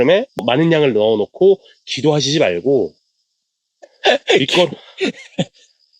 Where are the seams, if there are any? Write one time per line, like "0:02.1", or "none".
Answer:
none